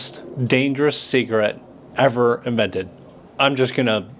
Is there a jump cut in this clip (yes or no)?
no